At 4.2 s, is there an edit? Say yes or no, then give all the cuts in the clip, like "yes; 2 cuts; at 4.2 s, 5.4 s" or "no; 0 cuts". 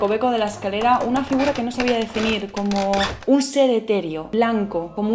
yes; 1 cut; at 4.2 s